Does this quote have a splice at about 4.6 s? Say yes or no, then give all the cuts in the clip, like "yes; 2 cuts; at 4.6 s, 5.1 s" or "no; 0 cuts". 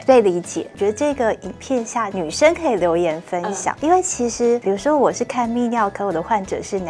yes; 3 cuts; at 2.1 s, 3.7 s, 4.6 s